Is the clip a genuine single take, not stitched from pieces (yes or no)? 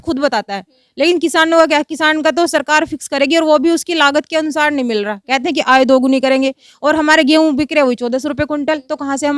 yes